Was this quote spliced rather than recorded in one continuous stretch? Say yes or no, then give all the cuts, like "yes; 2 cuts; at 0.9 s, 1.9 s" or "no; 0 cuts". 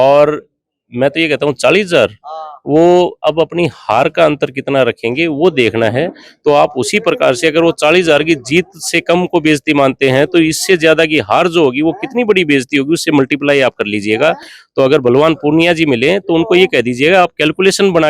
no; 0 cuts